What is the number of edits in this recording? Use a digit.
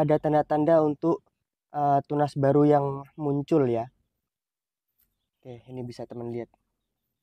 0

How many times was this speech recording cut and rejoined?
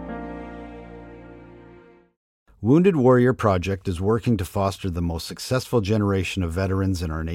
1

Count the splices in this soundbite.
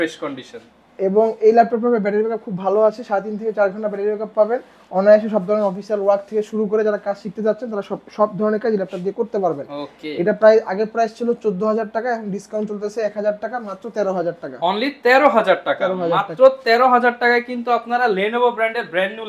0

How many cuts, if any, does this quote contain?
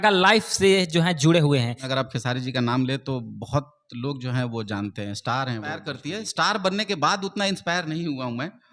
2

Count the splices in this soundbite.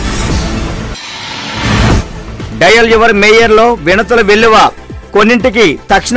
1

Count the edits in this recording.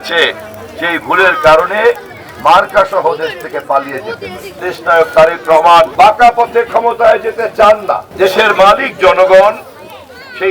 3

